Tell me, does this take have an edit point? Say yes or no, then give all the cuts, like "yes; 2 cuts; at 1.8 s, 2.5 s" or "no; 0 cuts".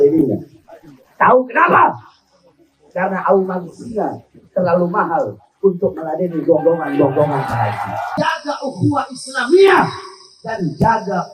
yes; 1 cut; at 8.1 s